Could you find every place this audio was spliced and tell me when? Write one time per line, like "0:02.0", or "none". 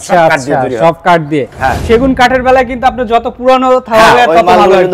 0:01.8